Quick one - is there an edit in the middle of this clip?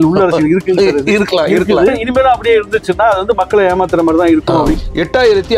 yes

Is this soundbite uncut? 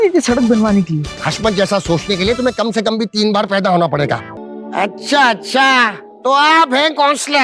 no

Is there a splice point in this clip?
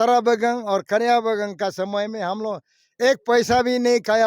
no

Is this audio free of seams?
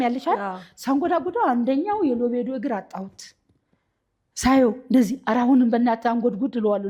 yes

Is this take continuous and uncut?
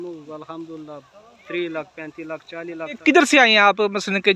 no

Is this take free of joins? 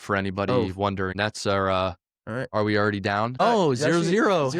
no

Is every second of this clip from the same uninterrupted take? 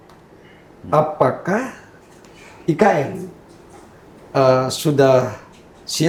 yes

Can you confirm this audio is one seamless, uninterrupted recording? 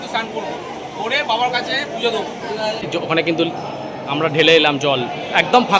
no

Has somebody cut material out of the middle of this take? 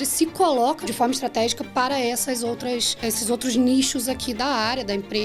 yes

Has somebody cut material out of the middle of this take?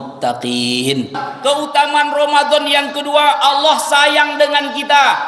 yes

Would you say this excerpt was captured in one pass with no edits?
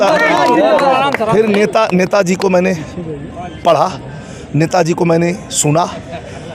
yes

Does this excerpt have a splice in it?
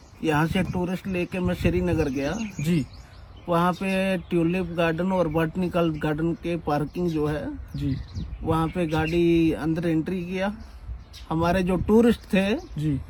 no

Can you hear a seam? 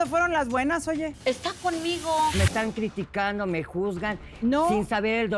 yes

